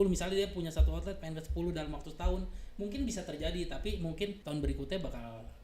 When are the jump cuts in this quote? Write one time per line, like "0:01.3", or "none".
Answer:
0:04.4